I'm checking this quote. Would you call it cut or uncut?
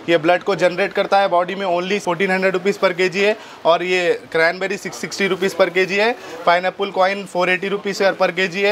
uncut